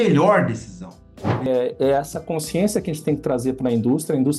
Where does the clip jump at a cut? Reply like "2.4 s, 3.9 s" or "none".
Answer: 1.5 s